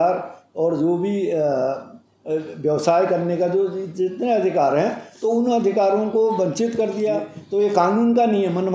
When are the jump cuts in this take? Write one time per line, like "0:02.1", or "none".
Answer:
0:07.3

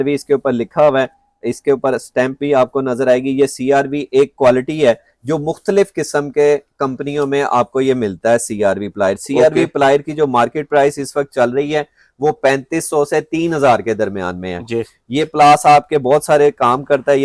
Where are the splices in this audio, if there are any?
none

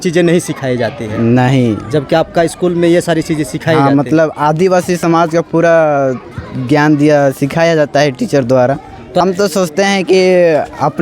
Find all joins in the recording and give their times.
0:09.2

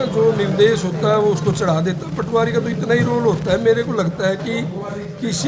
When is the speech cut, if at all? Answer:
none

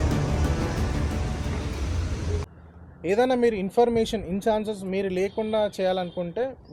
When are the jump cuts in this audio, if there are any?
0:02.5

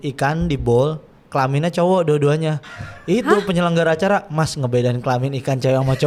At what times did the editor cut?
none

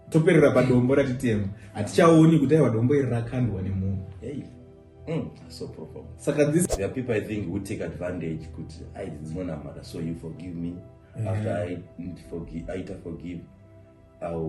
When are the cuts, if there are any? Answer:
0:06.6

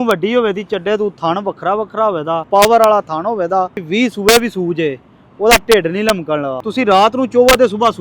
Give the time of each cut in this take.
0:02.4
0:03.8
0:06.6

